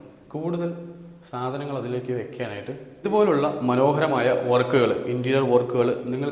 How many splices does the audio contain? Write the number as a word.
one